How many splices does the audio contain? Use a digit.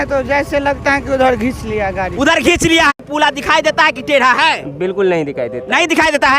1